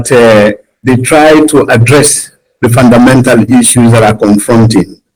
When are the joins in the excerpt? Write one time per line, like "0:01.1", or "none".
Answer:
none